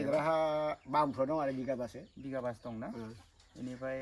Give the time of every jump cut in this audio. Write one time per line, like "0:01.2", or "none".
none